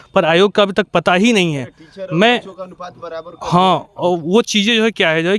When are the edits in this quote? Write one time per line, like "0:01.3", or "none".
none